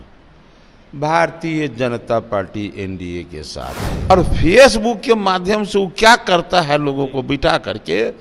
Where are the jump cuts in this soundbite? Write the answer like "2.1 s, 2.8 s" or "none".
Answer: 4.1 s